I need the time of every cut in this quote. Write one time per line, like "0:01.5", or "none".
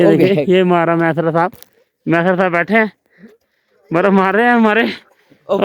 none